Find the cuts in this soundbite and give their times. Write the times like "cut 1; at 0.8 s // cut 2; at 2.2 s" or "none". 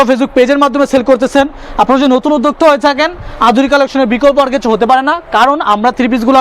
none